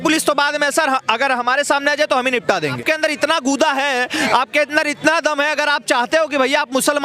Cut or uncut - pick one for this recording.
cut